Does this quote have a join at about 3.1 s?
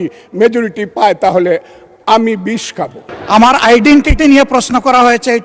yes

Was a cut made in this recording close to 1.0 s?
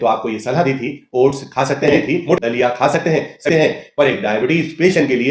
no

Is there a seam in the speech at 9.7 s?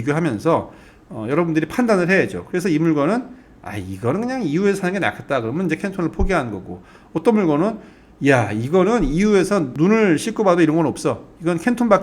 yes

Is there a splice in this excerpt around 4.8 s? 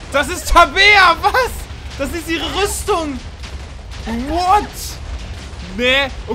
no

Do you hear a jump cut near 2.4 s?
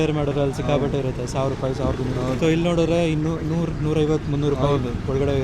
yes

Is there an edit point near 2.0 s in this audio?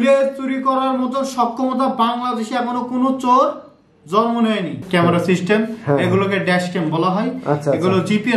no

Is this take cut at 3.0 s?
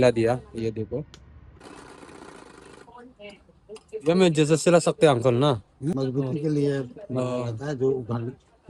no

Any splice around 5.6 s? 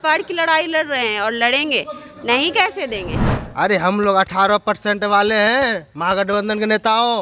no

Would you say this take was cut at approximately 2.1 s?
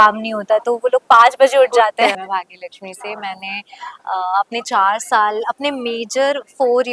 yes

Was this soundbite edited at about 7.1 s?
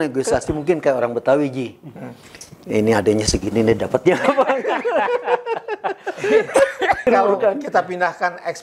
yes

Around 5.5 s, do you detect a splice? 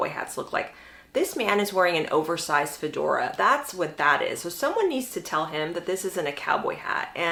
no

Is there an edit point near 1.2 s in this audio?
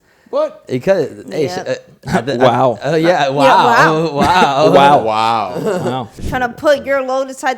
no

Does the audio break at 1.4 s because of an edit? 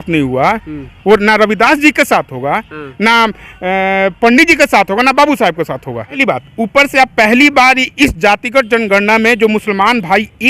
no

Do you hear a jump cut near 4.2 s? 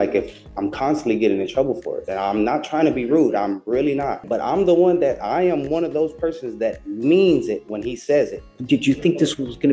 yes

